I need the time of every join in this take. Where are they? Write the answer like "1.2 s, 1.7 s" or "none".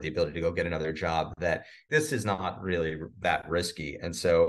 1.7 s